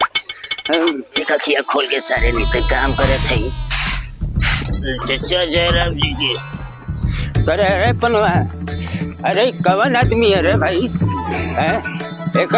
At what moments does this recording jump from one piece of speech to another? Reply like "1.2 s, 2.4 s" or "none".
1.3 s